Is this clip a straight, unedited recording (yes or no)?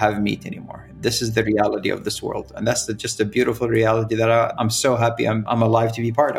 no